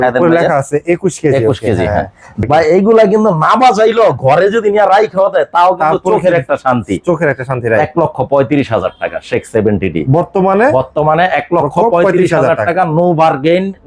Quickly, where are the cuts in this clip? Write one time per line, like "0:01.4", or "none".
0:02.3